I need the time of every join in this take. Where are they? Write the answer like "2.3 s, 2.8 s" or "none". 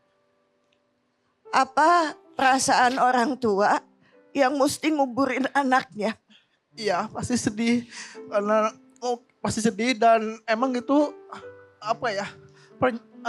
none